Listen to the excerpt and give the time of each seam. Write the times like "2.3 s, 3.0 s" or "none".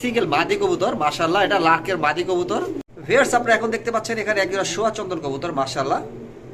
2.9 s